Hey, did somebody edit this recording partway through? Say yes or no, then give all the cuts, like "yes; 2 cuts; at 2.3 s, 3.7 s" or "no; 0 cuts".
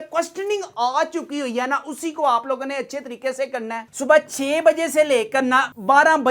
yes; 1 cut; at 3.9 s